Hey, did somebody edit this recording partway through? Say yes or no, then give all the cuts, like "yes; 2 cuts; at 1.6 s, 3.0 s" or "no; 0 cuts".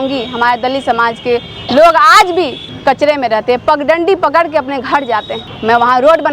no; 0 cuts